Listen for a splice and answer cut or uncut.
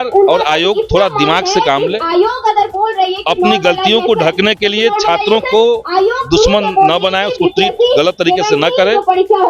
uncut